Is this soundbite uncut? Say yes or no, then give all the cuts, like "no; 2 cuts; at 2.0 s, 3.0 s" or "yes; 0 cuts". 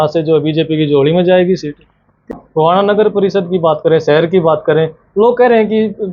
no; 1 cut; at 2.4 s